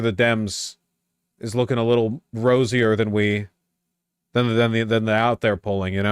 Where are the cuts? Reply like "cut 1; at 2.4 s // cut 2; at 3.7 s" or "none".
none